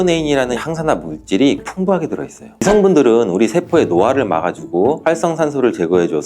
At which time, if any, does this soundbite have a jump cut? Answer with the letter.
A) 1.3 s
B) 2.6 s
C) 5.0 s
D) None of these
B